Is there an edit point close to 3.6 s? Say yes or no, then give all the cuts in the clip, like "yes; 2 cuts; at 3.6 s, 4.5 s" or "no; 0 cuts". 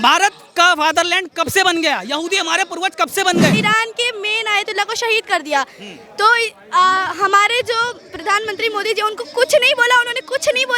yes; 1 cut; at 3.6 s